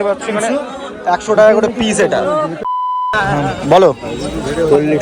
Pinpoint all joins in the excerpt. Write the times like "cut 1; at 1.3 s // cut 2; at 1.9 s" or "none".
cut 1; at 3.1 s